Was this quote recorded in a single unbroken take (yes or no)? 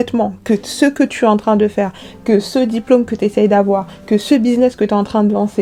yes